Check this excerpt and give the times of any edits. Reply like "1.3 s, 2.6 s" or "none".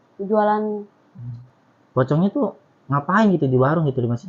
1.3 s